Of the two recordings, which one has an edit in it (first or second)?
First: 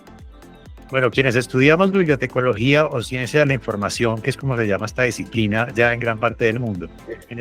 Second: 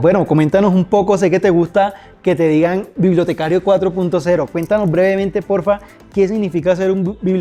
first